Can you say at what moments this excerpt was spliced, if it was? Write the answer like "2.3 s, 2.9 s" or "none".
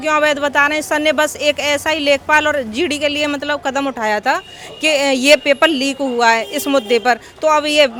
none